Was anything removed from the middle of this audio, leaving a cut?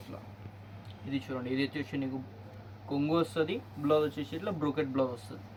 no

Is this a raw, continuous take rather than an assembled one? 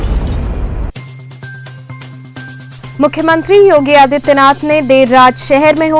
yes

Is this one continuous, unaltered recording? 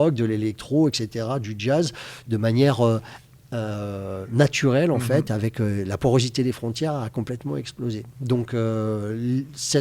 yes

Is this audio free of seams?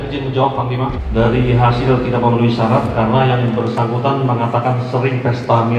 no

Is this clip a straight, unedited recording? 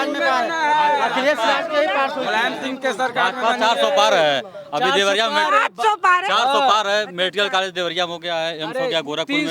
yes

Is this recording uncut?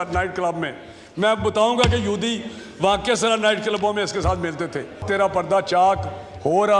no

